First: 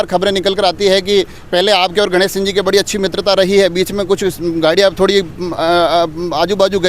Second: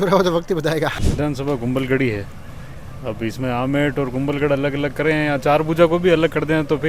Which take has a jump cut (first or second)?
second